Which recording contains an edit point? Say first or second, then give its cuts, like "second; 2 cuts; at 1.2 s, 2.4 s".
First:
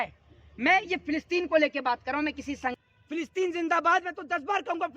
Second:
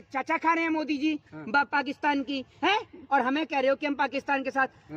first; 1 cut; at 2.7 s